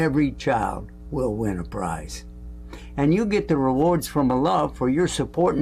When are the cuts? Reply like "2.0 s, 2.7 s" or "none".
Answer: none

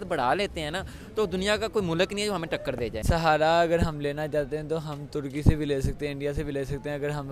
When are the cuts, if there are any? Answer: 3.0 s

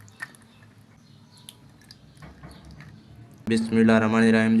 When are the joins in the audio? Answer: 1.0 s, 3.5 s

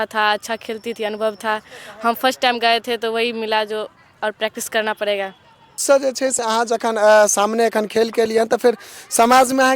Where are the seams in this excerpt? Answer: 5.8 s

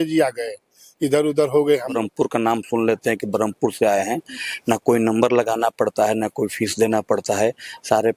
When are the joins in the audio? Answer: 2.0 s

